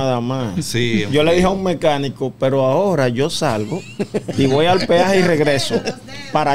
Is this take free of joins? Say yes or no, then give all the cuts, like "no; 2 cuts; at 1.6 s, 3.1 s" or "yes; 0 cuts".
yes; 0 cuts